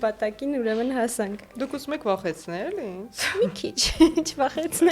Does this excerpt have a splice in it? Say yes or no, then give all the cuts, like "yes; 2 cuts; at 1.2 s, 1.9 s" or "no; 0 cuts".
no; 0 cuts